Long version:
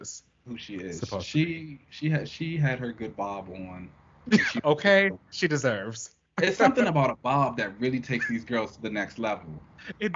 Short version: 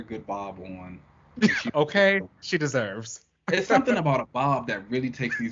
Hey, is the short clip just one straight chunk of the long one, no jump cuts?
yes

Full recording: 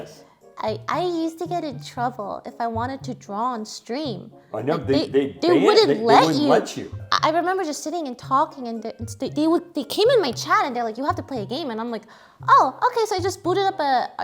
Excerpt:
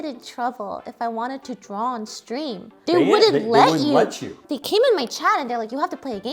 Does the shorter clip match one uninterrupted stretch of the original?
no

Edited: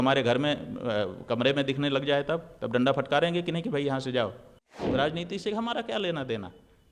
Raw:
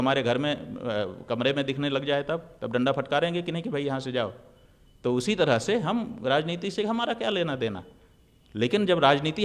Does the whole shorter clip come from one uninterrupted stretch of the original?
no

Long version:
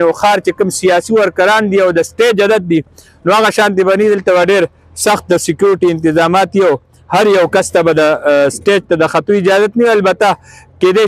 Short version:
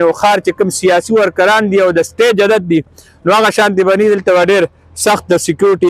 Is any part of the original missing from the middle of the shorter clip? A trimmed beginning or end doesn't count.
no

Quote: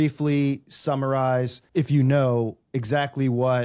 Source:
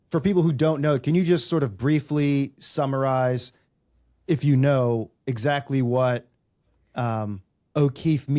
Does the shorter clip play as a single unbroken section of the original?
no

